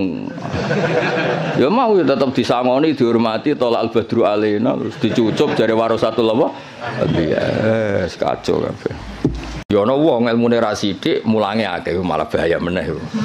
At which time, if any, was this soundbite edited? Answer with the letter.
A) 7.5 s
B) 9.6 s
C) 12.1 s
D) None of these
B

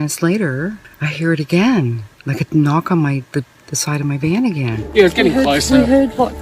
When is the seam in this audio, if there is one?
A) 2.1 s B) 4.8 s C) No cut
B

